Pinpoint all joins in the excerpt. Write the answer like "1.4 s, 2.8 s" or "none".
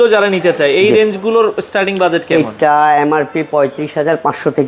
none